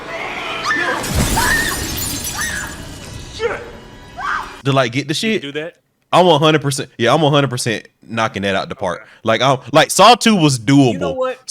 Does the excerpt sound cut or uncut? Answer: uncut